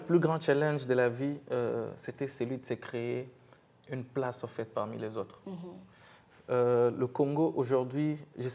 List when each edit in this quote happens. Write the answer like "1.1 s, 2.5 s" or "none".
none